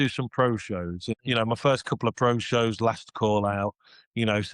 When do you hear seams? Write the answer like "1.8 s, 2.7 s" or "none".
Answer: 1.1 s